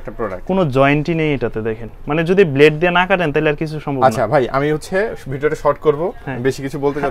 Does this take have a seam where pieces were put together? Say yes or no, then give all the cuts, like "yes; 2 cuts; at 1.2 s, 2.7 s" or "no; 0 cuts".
no; 0 cuts